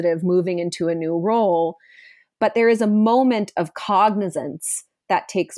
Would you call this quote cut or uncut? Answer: uncut